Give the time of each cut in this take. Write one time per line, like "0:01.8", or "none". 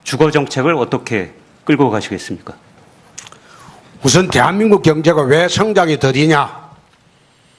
none